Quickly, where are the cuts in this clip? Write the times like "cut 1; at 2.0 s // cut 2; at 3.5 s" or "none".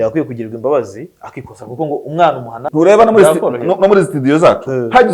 cut 1; at 2.6 s